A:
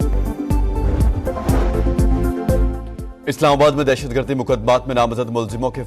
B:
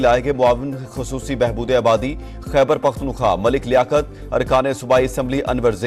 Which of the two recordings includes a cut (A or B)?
A